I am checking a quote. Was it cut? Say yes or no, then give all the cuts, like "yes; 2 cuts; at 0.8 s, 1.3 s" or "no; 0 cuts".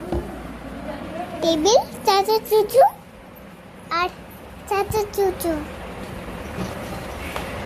no; 0 cuts